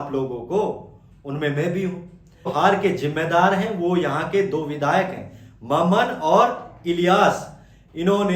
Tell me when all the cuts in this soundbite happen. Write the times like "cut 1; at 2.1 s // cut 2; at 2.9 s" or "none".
cut 1; at 2.5 s